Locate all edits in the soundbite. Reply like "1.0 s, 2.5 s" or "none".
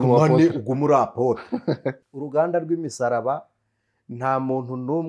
2.0 s